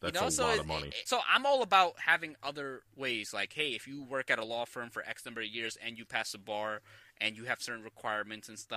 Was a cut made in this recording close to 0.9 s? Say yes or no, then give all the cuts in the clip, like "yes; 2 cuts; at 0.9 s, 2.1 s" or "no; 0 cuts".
yes; 1 cut; at 0.9 s